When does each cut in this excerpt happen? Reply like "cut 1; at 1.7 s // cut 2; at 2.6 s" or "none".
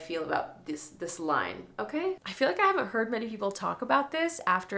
cut 1; at 2.3 s